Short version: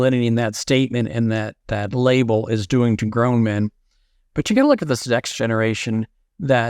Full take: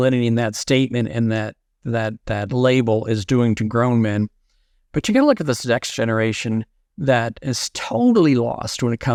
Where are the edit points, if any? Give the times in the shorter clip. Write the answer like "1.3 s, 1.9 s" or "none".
1.6 s